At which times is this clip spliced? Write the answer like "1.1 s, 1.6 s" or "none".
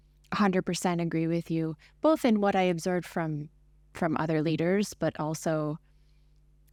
none